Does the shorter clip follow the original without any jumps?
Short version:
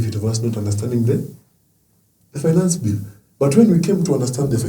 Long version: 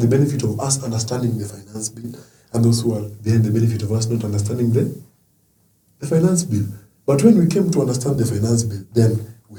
yes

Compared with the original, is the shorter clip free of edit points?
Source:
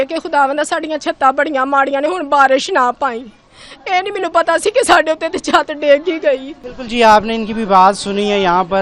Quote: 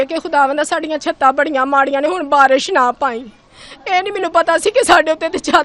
yes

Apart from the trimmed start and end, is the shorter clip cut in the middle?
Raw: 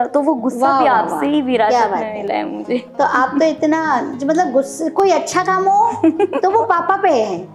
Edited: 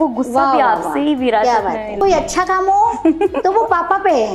yes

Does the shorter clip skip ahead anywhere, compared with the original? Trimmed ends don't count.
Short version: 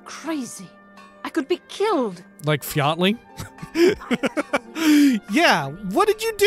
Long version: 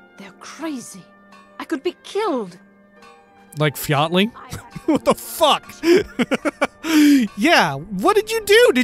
yes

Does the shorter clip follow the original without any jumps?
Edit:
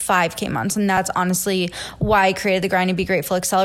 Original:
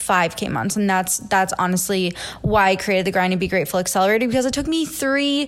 no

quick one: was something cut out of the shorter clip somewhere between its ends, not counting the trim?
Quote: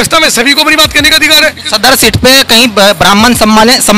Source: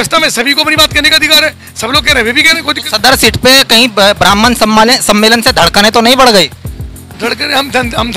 yes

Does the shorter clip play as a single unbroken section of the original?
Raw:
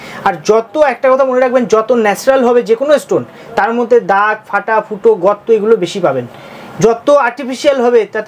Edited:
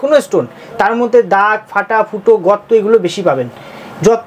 yes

